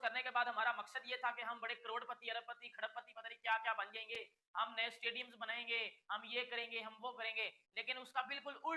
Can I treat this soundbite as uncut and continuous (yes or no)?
yes